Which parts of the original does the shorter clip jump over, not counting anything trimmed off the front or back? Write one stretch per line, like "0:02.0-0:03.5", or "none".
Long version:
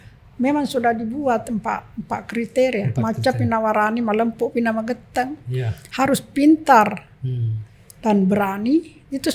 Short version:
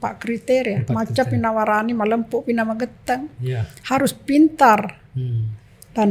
none